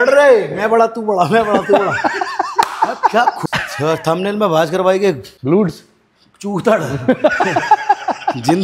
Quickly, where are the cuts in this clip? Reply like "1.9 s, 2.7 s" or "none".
3.4 s, 5.3 s